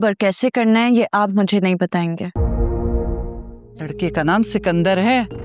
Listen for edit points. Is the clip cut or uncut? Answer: cut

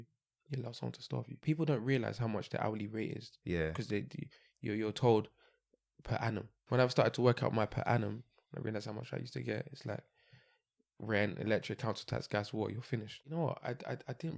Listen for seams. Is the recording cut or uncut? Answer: cut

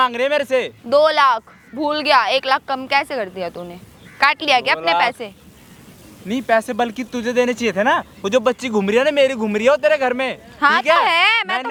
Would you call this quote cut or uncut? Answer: uncut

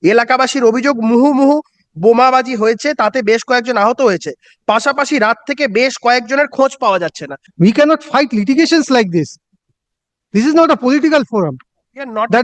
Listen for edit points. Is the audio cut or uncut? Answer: cut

